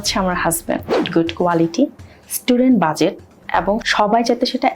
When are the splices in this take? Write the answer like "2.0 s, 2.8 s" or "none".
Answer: 1.0 s, 3.9 s